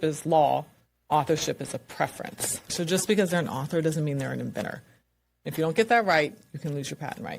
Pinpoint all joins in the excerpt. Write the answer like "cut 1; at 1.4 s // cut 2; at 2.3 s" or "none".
cut 1; at 2.6 s